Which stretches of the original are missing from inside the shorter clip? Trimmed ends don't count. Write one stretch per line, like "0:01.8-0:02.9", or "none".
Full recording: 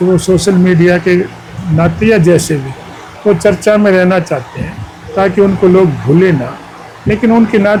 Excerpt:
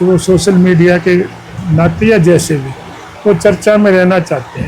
none